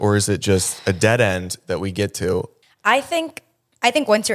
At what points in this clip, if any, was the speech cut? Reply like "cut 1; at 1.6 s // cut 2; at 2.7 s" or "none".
none